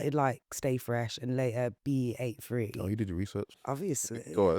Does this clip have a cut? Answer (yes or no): yes